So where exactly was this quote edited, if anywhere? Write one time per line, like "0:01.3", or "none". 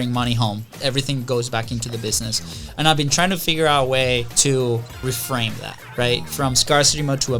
0:00.7
0:04.3
0:05.0